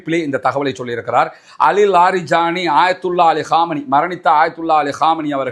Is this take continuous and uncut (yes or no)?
yes